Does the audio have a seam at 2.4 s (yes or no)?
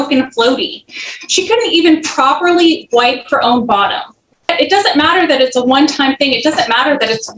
no